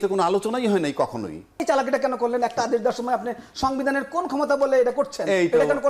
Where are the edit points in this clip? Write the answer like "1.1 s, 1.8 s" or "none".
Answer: 1.6 s